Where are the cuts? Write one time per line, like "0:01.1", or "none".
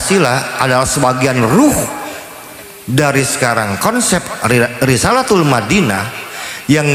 none